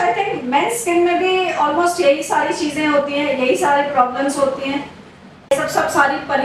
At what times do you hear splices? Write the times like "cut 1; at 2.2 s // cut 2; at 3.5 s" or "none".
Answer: cut 1; at 5.5 s